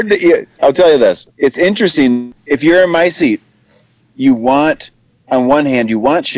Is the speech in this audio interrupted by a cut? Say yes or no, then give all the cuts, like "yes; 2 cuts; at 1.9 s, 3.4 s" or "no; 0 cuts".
yes; 1 cut; at 1.3 s